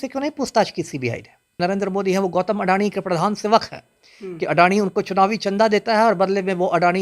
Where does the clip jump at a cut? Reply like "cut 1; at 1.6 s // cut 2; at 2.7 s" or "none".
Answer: cut 1; at 1.6 s